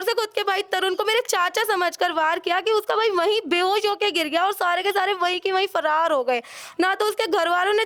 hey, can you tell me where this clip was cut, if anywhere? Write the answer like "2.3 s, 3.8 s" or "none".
none